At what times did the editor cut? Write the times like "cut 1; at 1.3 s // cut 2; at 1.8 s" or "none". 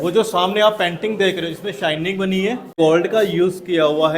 cut 1; at 2.8 s